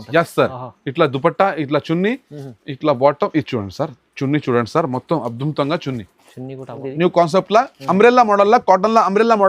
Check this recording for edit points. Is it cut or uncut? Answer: cut